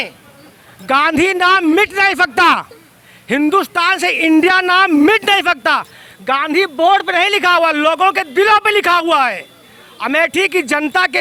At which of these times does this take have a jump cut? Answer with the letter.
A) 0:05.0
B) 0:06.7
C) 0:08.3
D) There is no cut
D